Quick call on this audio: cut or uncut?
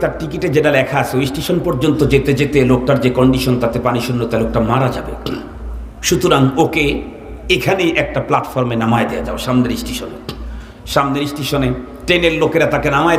uncut